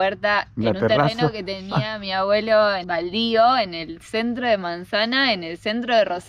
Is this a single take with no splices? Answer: yes; 0 cuts

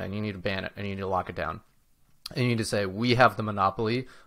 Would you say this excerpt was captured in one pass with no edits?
yes; 0 cuts

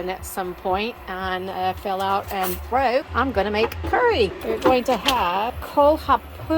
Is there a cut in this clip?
yes; 3 cuts; at 3.1 s, 4.4 s, 5.6 s

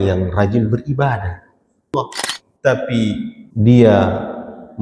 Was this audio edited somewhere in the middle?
yes; 2 cuts; at 1.9 s, 3.4 s

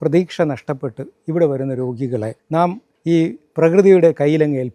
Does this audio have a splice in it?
yes; 1 cut; at 2.5 s

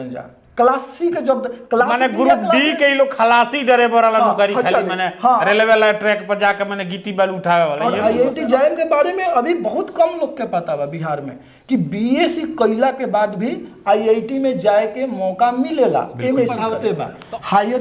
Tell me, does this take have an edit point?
yes; 2 cuts; at 8.0 s, 16.7 s

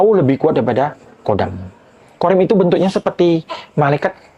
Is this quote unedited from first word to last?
no; 1 cut; at 2.0 s

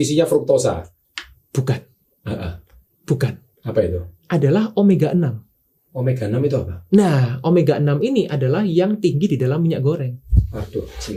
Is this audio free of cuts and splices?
yes; 0 cuts

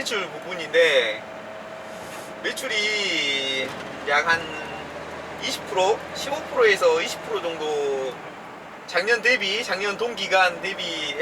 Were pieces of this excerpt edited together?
no; 0 cuts

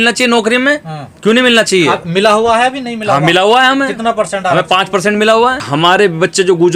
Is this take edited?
yes; 1 cut; at 5.6 s

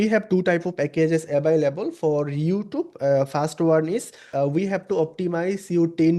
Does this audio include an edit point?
yes; 1 cut; at 4.2 s

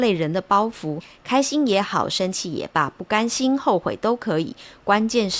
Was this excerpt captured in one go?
no; 1 cut; at 1.1 s

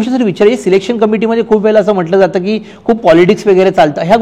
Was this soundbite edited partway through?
no; 0 cuts

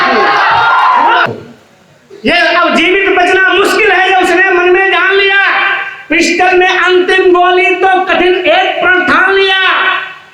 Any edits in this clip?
yes; 1 cut; at 1.3 s

